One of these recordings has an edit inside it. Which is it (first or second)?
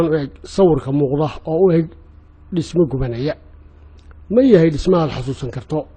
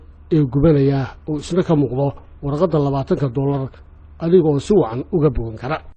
first